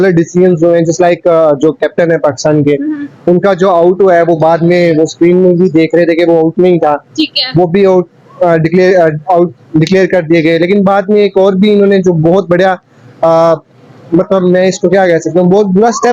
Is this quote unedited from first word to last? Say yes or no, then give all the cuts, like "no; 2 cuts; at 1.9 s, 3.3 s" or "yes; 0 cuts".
yes; 0 cuts